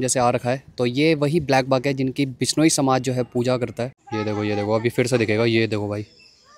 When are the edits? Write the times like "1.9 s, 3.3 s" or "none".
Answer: 4.0 s